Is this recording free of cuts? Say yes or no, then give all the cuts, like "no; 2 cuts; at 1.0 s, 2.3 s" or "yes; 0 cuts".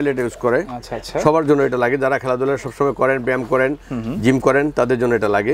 yes; 0 cuts